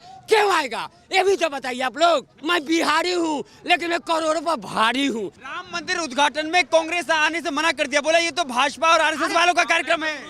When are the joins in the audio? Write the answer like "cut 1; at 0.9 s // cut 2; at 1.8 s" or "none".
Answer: cut 1; at 2.3 s // cut 2; at 5.4 s